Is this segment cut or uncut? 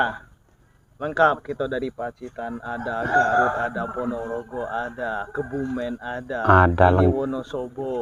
uncut